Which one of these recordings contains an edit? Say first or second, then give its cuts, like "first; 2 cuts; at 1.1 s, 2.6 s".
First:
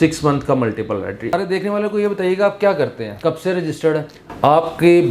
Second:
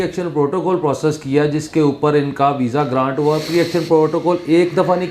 first; 3 cuts; at 1.3 s, 3.1 s, 4.2 s